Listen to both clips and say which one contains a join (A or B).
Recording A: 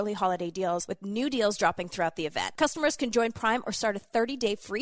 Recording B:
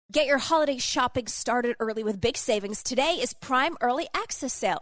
A